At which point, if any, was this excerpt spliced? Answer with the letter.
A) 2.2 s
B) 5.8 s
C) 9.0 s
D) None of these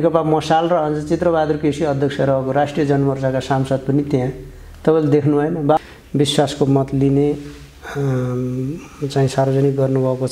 B